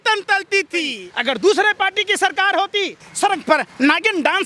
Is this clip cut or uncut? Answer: cut